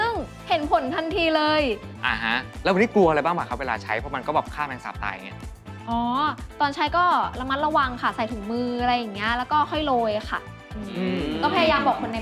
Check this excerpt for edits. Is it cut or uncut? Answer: uncut